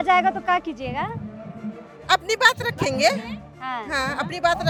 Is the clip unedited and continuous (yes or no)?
yes